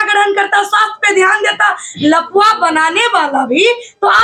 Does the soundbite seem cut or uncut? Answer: uncut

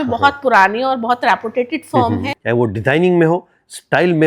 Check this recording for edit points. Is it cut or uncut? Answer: cut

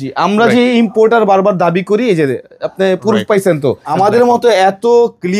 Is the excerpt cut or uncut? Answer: cut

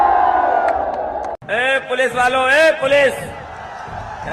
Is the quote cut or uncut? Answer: cut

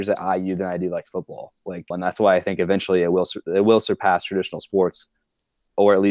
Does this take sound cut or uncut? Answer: cut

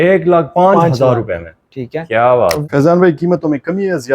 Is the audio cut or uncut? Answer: cut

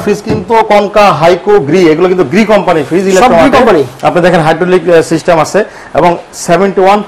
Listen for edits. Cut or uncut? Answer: uncut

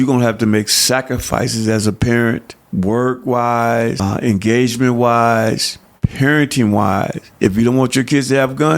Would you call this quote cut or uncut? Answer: cut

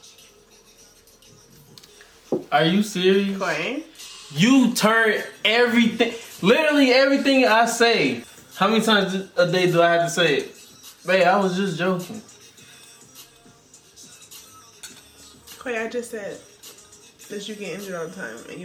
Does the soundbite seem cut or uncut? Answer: uncut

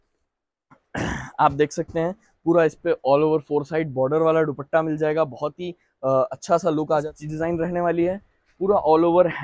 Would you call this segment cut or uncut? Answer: cut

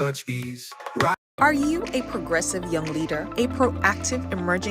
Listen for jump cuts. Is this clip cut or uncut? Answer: cut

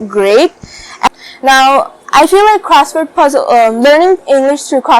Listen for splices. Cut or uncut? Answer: cut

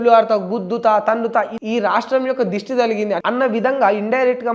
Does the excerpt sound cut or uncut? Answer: cut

